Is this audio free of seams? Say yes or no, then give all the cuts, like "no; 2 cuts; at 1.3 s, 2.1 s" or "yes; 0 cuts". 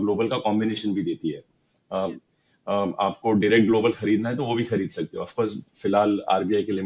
yes; 0 cuts